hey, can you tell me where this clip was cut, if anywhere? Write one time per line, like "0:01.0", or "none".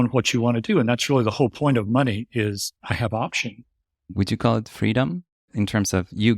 0:02.7
0:04.0
0:05.5